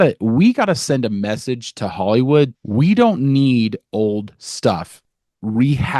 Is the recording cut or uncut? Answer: cut